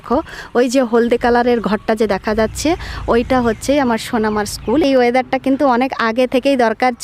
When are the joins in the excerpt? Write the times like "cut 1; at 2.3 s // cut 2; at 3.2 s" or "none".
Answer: cut 1; at 4.8 s